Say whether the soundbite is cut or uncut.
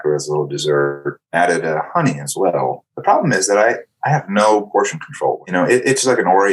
cut